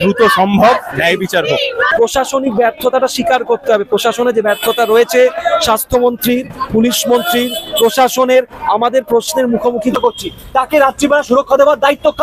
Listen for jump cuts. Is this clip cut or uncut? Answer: cut